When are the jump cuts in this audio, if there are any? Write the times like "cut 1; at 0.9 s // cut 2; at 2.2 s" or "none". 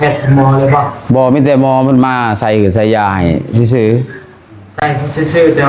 none